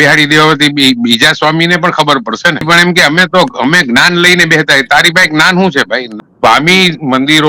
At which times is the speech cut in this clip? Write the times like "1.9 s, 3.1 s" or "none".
2.6 s, 6.1 s